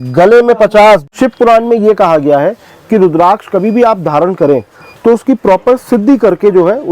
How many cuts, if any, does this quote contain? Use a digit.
1